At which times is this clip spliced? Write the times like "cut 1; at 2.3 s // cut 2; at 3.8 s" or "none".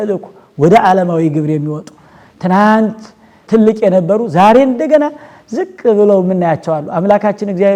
none